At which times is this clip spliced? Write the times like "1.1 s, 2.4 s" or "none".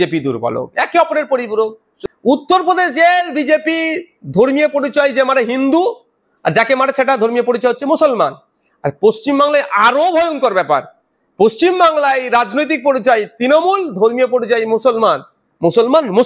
1.9 s

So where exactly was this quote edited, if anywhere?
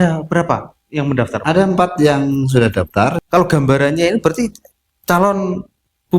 3.2 s

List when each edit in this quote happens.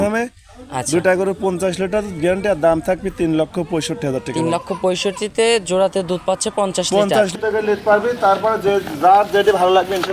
7.3 s

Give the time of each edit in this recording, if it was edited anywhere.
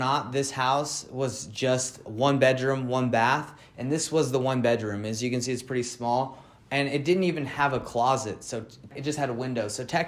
2.0 s, 8.9 s

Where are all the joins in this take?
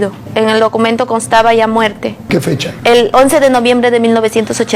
2.2 s

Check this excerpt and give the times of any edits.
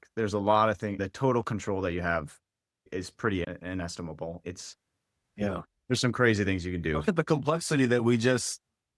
7.0 s

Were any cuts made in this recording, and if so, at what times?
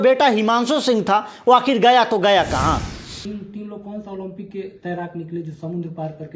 2.7 s

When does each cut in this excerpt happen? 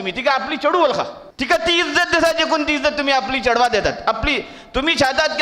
1.2 s

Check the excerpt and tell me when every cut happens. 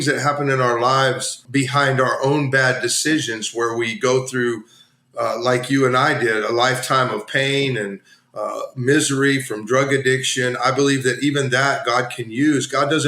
1.4 s

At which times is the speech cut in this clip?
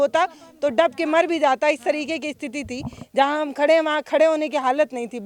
none

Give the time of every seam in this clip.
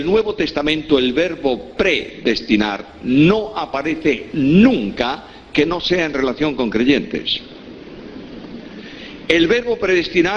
7.2 s

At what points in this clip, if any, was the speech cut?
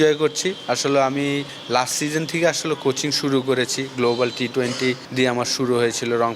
1.5 s, 5.0 s

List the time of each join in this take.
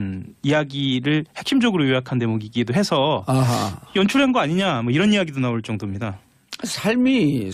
2.1 s

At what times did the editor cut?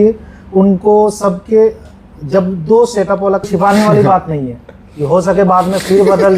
3.5 s

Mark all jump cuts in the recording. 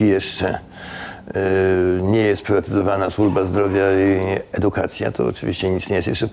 none

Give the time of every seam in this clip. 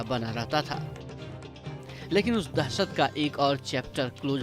0.8 s, 2.1 s

